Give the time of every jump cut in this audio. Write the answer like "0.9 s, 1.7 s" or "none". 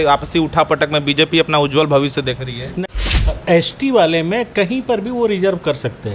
2.8 s